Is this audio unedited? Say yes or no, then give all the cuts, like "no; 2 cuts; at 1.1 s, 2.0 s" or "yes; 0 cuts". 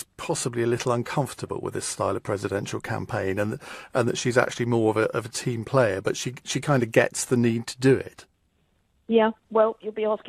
yes; 0 cuts